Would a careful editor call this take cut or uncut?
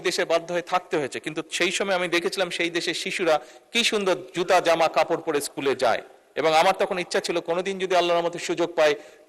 uncut